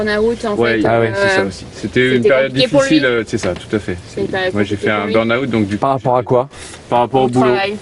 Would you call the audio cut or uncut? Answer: uncut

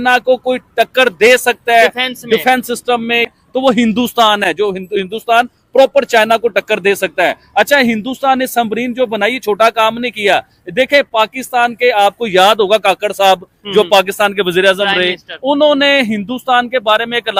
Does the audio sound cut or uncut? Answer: uncut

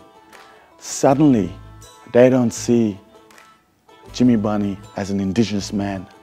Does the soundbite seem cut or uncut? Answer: uncut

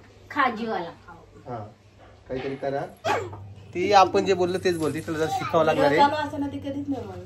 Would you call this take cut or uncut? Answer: cut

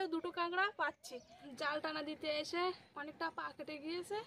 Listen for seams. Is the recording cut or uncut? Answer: cut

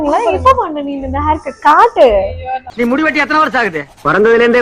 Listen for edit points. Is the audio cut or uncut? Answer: cut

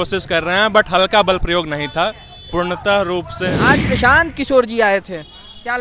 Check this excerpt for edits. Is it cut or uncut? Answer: cut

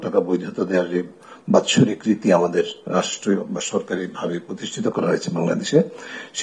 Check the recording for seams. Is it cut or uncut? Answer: uncut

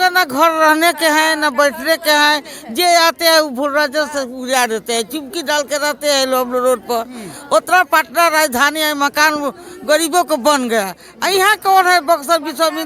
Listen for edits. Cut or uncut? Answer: uncut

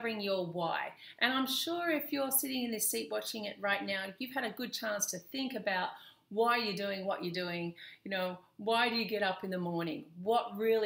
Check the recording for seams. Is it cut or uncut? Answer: cut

